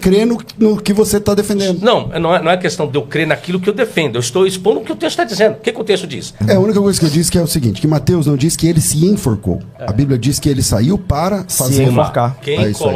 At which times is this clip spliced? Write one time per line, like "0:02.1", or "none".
0:06.4